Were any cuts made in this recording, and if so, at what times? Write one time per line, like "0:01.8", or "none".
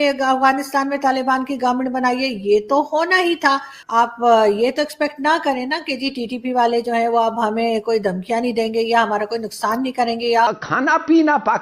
0:03.8
0:10.5